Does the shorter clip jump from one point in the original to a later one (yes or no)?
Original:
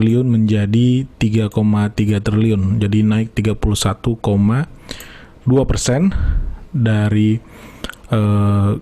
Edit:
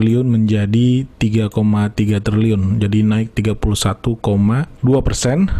yes